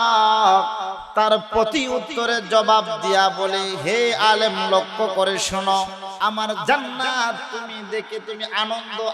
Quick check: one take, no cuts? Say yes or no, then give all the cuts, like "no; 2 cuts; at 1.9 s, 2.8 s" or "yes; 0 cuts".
no; 2 cuts; at 0.9 s, 6.0 s